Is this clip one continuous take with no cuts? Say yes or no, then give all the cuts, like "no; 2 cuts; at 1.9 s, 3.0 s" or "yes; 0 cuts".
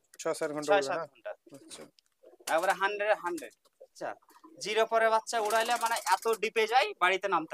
no; 1 cut; at 4.0 s